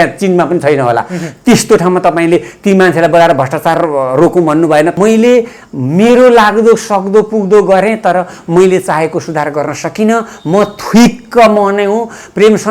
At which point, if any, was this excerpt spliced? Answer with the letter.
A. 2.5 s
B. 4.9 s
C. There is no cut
B